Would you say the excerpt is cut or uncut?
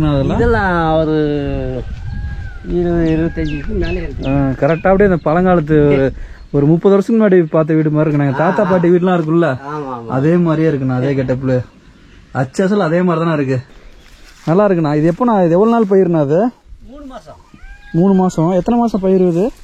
cut